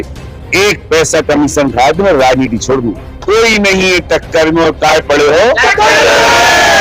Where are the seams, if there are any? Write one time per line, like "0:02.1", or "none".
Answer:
0:03.1